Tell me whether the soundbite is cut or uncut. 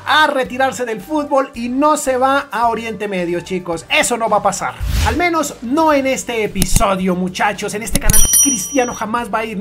uncut